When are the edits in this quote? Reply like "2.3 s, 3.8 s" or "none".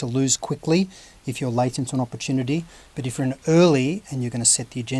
none